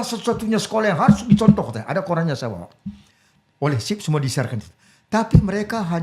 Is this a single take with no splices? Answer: yes; 0 cuts

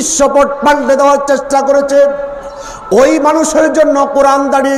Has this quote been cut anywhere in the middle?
no; 0 cuts

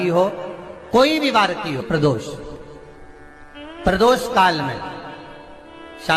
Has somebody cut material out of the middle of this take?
yes; 1 cut; at 1.8 s

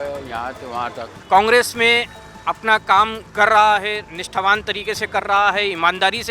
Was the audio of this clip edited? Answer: yes; 1 cut; at 1.1 s

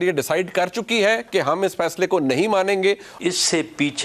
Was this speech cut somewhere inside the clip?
yes; 1 cut; at 3.1 s

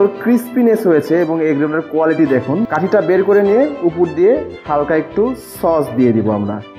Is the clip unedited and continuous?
no; 1 cut; at 2.7 s

